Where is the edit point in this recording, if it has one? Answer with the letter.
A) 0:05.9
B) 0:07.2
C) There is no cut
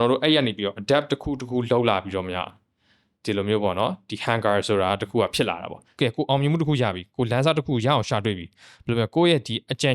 A